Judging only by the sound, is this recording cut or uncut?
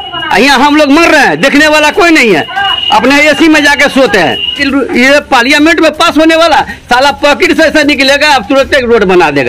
cut